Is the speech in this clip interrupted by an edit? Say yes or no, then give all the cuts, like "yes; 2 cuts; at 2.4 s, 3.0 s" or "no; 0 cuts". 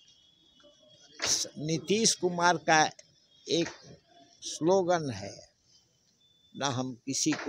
no; 0 cuts